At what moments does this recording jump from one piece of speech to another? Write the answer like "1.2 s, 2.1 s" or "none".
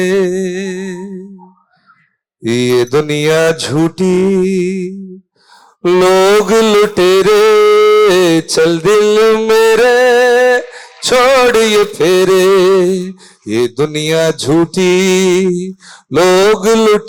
none